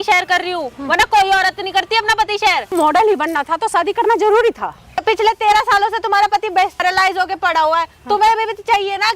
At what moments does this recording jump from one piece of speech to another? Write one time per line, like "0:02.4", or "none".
0:02.7
0:05.0
0:06.8